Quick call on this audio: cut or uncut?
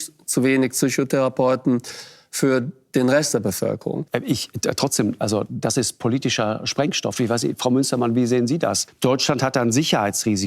cut